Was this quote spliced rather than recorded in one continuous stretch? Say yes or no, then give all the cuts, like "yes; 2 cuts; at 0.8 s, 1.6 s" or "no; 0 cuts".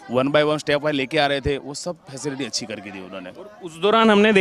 no; 0 cuts